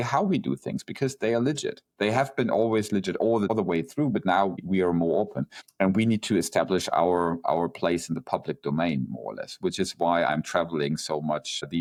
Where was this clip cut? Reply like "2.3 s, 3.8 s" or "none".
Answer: none